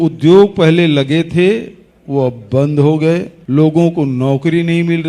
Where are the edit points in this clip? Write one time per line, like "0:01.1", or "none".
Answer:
0:03.3